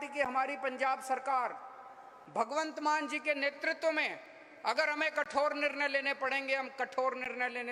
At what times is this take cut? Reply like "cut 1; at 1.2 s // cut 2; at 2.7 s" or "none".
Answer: none